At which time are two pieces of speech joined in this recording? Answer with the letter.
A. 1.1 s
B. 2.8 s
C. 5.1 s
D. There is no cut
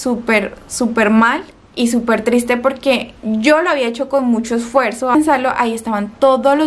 C